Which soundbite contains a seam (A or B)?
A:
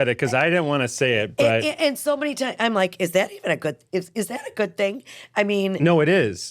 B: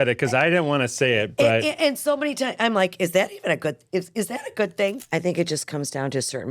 B